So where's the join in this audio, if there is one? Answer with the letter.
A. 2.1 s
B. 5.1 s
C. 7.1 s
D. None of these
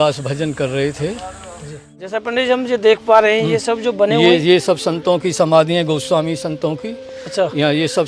A